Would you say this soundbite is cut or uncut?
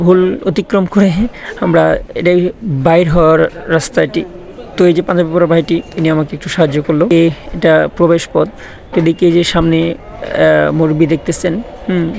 cut